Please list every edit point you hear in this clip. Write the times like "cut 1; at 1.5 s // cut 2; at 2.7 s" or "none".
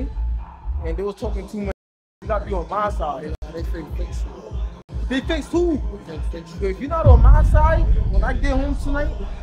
none